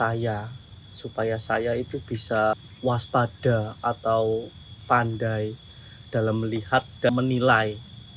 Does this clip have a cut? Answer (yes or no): yes